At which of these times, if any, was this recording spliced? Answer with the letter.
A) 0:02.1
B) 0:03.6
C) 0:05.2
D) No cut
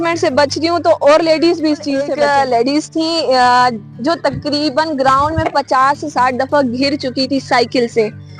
A